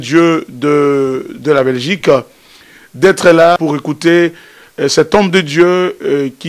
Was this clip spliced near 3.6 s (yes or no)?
yes